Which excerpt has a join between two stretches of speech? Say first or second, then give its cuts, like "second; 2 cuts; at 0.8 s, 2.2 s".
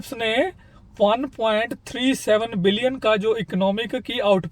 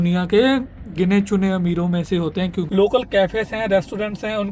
second; 1 cut; at 2.6 s